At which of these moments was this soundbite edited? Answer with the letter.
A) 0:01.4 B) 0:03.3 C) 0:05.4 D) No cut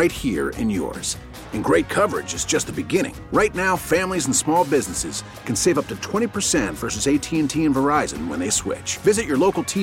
D